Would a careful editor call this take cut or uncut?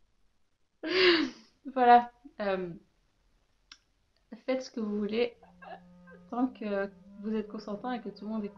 uncut